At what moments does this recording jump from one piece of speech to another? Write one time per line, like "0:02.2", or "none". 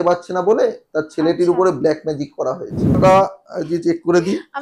0:03.0